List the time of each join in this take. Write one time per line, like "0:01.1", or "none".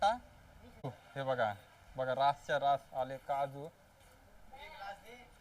0:01.0